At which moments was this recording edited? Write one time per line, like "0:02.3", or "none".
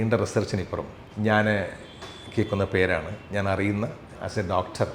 none